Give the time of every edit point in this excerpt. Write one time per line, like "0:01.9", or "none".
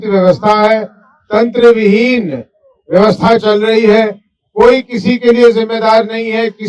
none